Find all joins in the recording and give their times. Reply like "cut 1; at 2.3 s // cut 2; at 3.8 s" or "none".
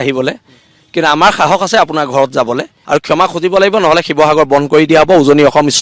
cut 1; at 2.7 s